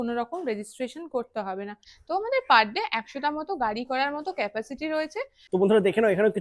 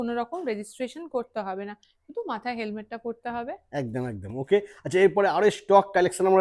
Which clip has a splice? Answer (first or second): first